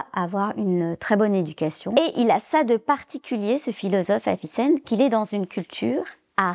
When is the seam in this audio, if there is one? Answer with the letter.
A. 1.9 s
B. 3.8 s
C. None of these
A